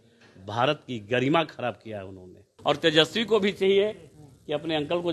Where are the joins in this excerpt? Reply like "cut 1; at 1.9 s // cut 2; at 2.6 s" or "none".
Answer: cut 1; at 2.5 s